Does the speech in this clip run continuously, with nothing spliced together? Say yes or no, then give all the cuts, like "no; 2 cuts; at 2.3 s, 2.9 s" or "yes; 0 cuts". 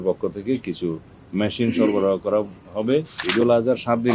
no; 1 cut; at 3.2 s